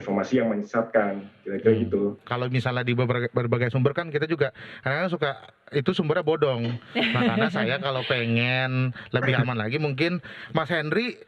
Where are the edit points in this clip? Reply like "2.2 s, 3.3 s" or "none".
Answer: 2.2 s